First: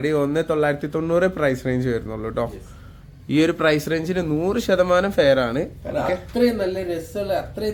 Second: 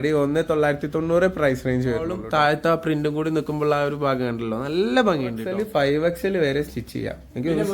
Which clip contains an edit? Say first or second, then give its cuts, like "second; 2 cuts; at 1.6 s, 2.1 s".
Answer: second; 2 cuts; at 2.2 s, 5.4 s